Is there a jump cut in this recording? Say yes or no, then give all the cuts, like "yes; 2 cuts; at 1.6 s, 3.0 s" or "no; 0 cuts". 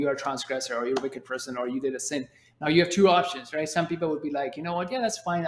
no; 0 cuts